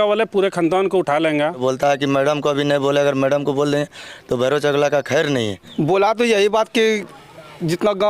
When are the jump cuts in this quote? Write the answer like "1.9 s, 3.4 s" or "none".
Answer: 1.6 s, 5.6 s